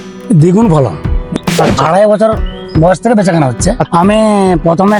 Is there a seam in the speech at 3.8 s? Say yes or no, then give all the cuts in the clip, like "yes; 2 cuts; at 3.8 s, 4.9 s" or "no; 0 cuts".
yes; 2 cuts; at 1.3 s, 3.8 s